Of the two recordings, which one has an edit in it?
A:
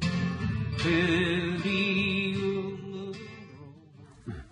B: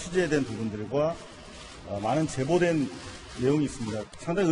B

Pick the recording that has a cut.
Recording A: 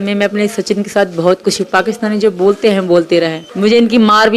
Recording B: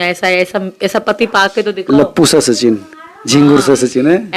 A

